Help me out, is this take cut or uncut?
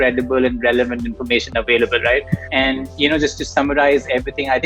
cut